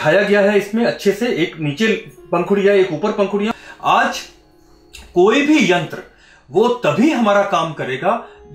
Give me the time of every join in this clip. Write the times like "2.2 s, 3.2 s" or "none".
3.5 s